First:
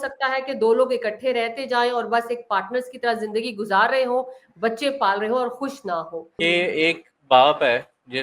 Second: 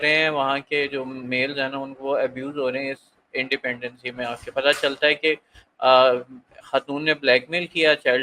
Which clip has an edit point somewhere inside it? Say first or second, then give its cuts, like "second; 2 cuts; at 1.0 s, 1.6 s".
first; 1 cut; at 6.3 s